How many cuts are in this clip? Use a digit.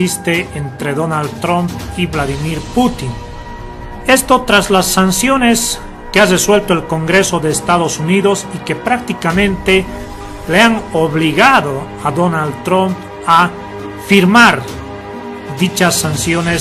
0